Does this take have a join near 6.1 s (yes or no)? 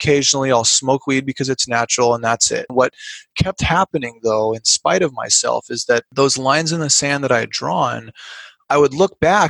yes